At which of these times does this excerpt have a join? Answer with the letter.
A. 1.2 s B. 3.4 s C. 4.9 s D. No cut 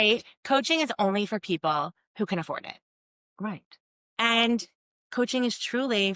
C